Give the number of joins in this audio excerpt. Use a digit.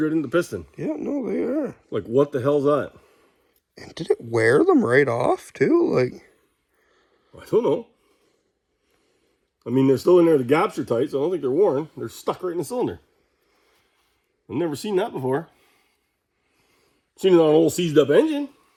0